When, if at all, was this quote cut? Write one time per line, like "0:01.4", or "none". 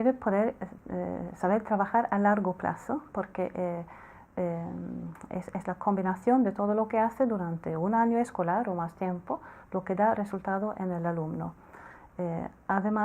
0:01.0

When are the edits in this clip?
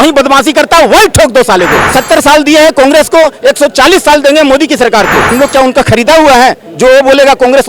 0:01.8
0:05.3

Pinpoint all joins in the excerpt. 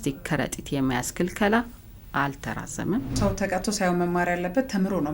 0:03.1

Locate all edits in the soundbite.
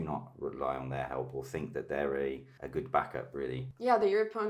0:02.5
0:03.7

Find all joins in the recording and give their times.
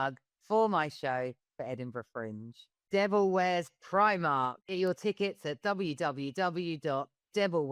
0:02.9

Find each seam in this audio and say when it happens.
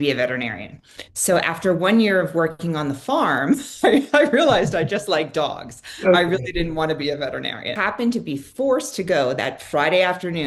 0:07.7

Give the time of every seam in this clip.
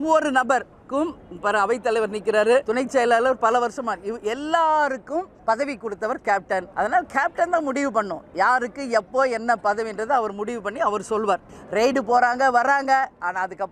0:02.7
0:05.3
0:06.7
0:11.6

